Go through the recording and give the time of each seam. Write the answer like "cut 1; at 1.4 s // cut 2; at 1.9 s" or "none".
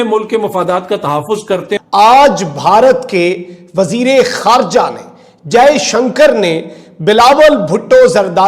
cut 1; at 1.8 s